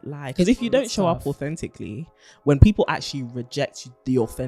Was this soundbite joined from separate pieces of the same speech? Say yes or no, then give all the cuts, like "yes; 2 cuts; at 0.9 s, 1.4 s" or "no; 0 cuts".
no; 0 cuts